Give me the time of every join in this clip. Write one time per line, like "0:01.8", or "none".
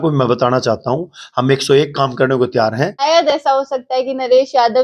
0:03.0